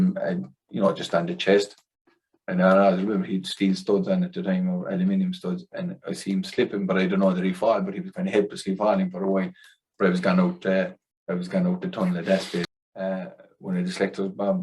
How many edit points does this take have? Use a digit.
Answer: 1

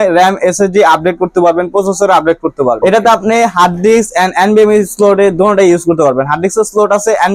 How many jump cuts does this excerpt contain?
1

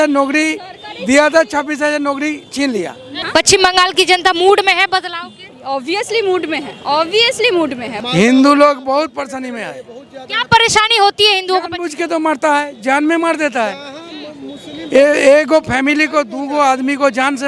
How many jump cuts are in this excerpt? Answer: 2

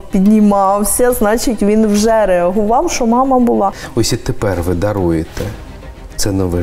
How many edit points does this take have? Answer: 1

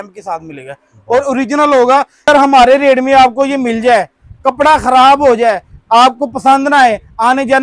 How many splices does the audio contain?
1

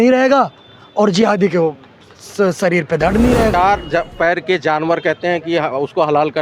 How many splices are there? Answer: 1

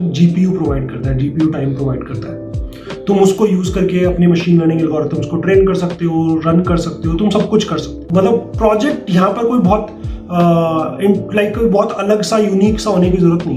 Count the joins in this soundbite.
1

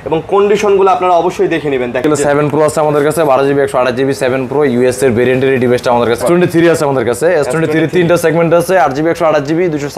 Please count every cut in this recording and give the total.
2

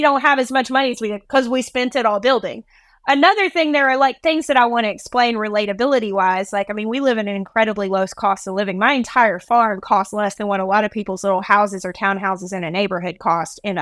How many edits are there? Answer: 0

